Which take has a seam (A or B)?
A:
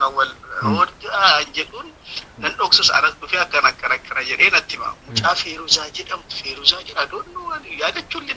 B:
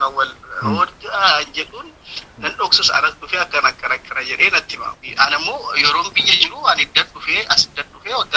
B